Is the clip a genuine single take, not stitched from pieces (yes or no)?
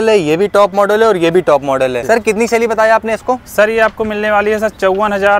yes